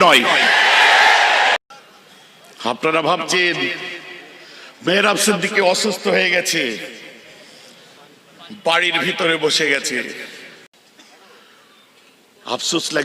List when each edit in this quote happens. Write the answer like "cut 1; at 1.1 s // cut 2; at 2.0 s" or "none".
cut 1; at 1.6 s // cut 2; at 10.7 s